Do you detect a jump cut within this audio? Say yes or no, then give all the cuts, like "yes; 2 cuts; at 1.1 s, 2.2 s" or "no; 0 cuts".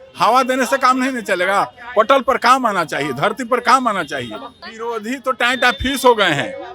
yes; 1 cut; at 4.6 s